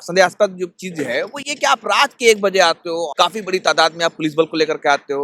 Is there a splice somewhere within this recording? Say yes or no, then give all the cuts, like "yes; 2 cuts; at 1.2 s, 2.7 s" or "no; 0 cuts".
yes; 1 cut; at 3.1 s